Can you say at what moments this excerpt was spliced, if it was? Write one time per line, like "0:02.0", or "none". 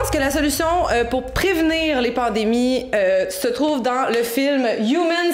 none